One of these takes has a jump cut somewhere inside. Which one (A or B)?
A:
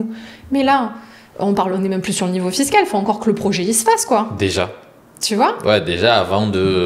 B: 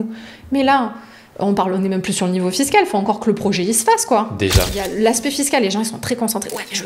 B